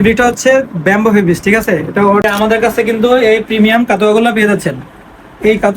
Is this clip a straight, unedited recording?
no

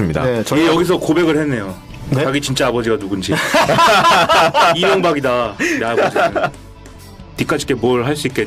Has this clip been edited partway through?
yes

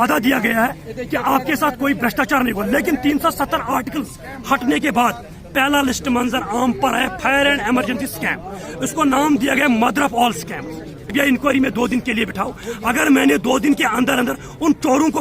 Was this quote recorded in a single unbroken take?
no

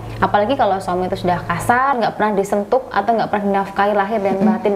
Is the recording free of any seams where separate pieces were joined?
no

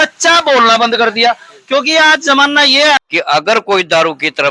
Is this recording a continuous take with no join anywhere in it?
no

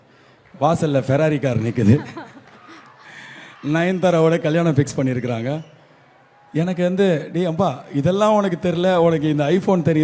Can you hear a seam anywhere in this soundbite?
no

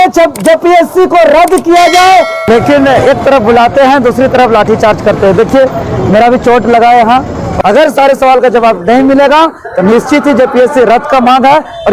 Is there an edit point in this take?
yes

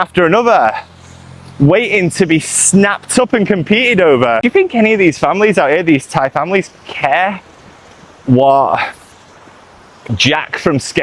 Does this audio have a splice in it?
yes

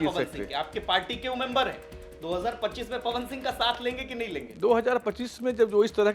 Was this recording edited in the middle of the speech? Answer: no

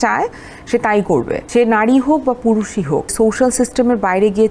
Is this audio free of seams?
no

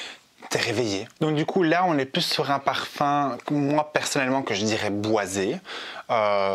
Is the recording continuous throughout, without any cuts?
yes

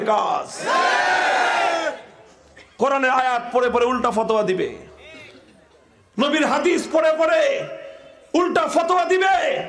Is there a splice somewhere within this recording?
no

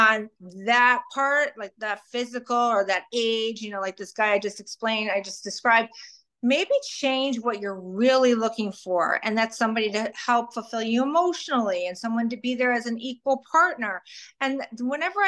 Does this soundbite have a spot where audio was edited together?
no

